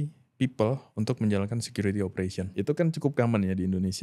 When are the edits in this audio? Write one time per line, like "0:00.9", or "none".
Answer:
0:02.5